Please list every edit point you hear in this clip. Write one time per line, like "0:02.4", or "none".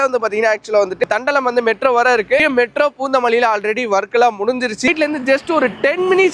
0:01.0
0:02.3
0:04.9